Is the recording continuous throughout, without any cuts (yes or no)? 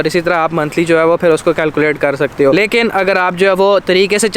yes